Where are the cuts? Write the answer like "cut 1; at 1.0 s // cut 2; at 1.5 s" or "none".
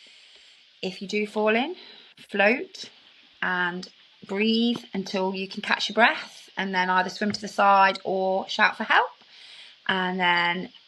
none